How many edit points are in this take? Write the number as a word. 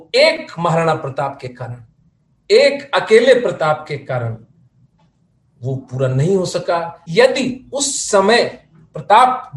one